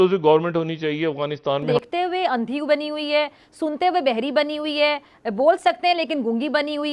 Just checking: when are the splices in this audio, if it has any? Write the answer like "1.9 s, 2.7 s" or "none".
1.7 s